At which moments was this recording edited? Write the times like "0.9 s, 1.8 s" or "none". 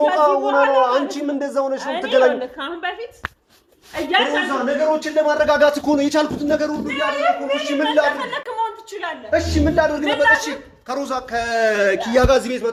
none

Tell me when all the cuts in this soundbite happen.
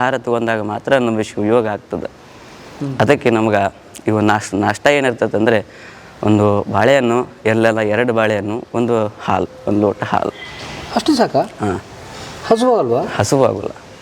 none

